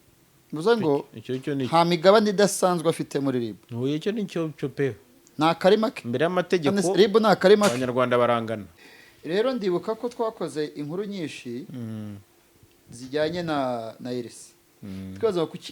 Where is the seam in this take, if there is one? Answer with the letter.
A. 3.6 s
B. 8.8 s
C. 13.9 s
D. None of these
B